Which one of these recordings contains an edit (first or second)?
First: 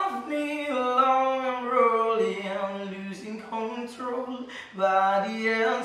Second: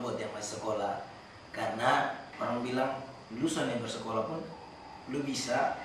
second